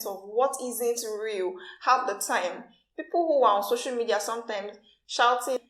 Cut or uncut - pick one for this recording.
uncut